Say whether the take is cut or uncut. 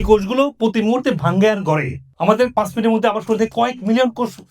cut